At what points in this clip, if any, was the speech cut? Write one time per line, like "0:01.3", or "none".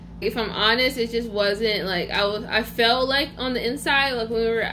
none

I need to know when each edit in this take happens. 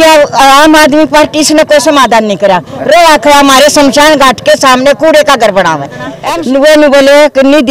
0:06.1

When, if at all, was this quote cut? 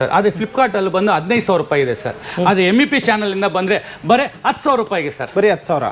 none

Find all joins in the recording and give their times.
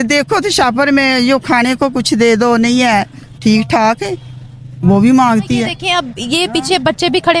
0:05.8

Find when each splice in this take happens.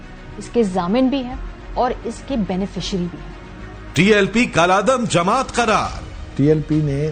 0:03.4

